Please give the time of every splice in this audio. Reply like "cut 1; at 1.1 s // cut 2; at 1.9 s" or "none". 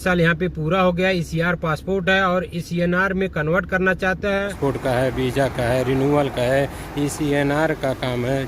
cut 1; at 4.5 s